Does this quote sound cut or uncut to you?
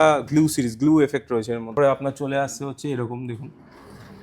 cut